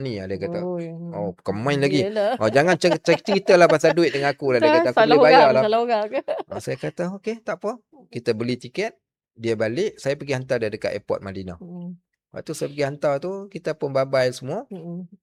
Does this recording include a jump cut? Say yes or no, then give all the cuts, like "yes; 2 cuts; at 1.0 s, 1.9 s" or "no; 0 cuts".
no; 0 cuts